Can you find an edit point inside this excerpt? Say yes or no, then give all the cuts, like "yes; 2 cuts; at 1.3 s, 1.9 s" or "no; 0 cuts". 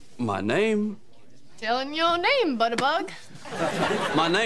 no; 0 cuts